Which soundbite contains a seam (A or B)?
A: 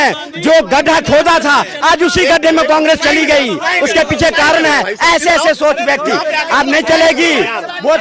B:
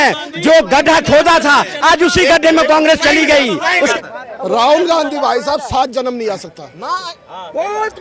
B